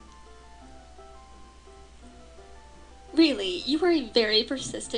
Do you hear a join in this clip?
yes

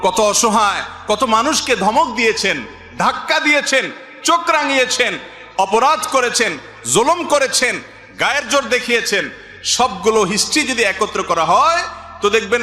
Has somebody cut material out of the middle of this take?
no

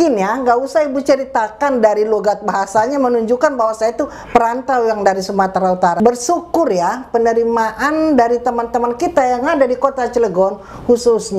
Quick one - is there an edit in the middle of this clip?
yes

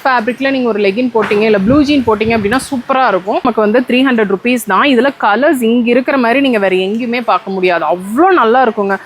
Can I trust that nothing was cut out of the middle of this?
no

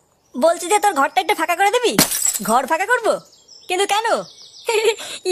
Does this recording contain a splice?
no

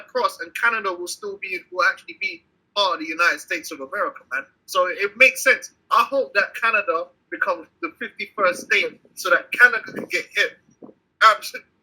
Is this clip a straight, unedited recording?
no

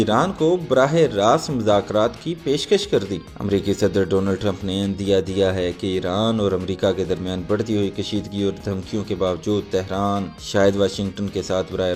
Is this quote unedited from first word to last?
yes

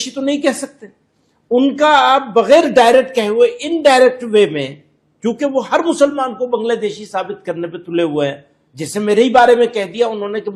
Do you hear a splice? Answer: no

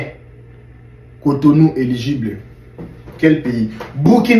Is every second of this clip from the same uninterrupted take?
yes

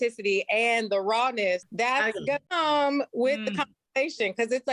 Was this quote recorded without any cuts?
no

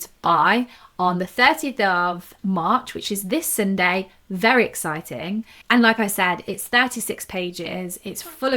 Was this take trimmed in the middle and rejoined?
yes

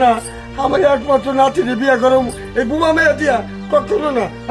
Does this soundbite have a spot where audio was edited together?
no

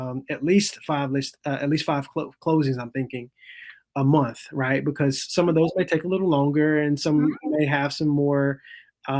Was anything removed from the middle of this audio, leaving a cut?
no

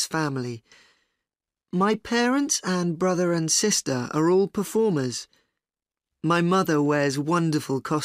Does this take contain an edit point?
yes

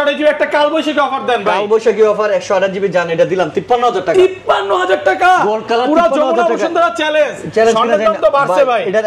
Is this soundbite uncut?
yes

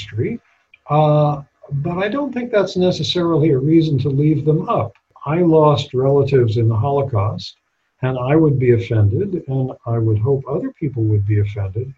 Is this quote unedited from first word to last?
no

